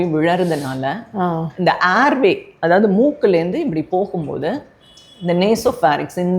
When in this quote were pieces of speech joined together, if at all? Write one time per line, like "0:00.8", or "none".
none

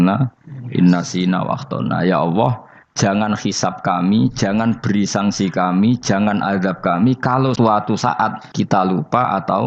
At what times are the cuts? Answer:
0:07.5
0:08.4

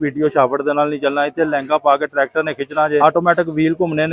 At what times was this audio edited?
0:03.0

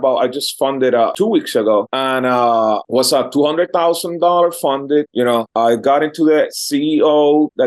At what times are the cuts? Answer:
none

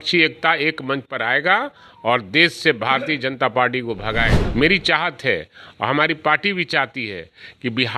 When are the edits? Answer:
0:04.4

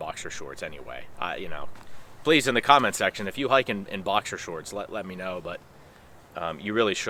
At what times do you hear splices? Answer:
none

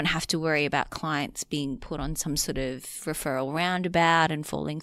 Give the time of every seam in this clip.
none

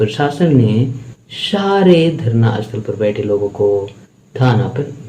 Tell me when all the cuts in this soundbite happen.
none

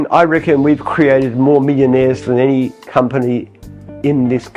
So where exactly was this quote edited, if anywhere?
none

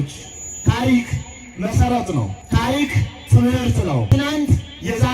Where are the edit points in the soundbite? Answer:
0:02.4
0:04.1

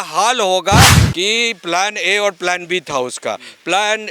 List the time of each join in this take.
0:01.0

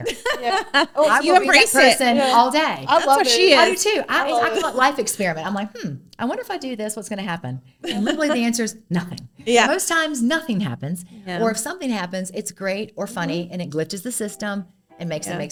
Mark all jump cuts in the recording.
none

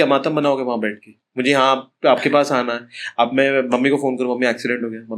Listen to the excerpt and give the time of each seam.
none

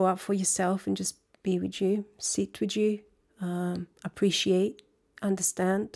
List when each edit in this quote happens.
none

